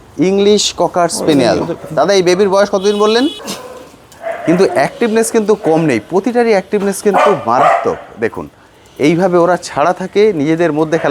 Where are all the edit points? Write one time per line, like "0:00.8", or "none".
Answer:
0:03.5